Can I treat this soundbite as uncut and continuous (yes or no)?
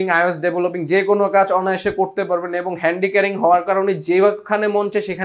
yes